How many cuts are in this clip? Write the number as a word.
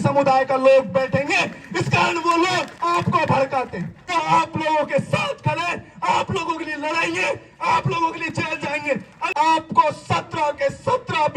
three